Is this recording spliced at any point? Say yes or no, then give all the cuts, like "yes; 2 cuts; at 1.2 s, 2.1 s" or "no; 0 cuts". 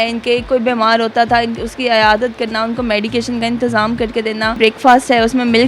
yes; 1 cut; at 4.6 s